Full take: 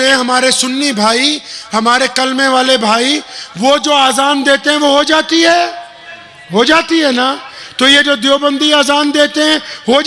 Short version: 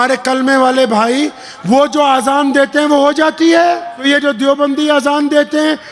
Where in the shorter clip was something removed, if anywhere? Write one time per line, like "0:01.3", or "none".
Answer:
0:04.0